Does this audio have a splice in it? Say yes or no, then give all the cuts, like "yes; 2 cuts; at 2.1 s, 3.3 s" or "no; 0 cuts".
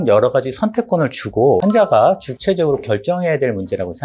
no; 0 cuts